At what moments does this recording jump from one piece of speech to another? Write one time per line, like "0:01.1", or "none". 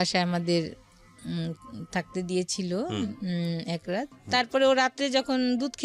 0:04.2